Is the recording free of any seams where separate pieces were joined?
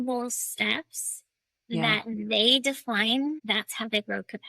no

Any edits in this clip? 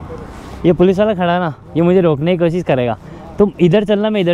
no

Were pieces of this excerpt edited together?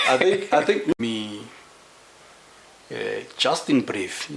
yes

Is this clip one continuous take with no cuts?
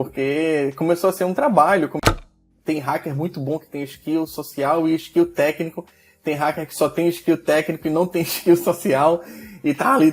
no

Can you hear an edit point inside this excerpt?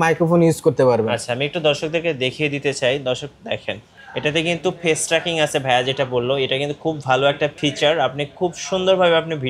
yes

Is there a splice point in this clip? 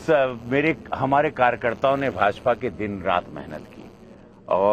yes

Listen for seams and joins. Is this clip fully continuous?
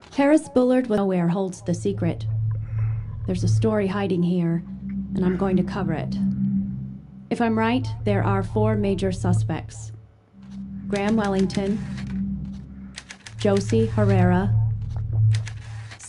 no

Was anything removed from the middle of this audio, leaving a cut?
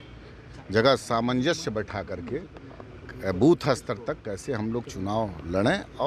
no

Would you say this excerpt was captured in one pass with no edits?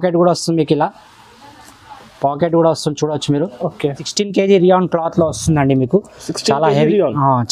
no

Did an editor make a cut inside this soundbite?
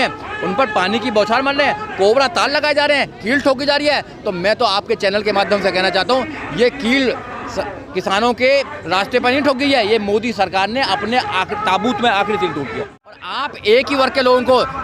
yes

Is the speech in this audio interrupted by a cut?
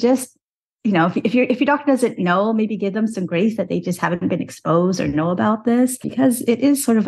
yes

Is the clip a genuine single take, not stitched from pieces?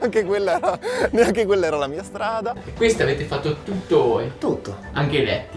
no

